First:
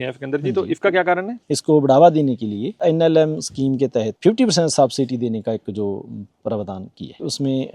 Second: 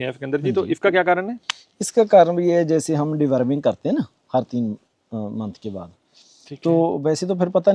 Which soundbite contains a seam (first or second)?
first